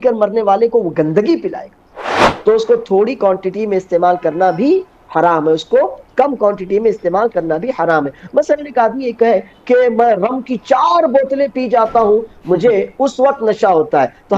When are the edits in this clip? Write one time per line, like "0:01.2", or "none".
0:02.3

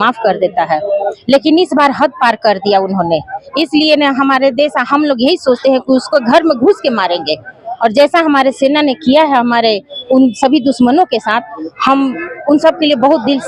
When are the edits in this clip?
none

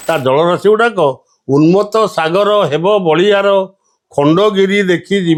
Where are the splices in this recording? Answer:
none

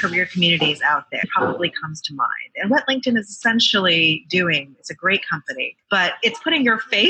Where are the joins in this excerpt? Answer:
0:01.3

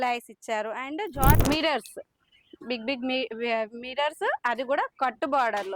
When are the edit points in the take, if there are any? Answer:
0:01.4

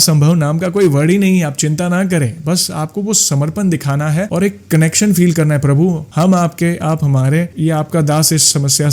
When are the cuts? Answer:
none

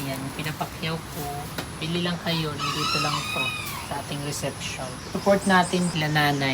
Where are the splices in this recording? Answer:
0:01.8
0:05.0

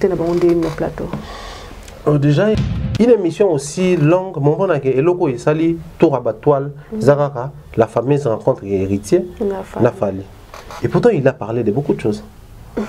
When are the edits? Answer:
0:02.6

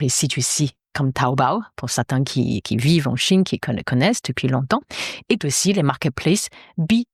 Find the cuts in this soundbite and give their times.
none

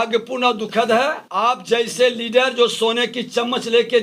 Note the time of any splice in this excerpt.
0:01.2

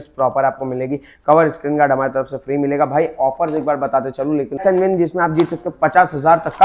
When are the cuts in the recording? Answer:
0:04.6

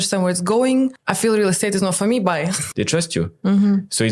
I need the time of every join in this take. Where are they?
0:01.0
0:02.6

